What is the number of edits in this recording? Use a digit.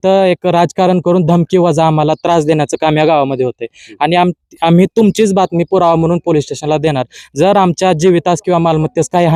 0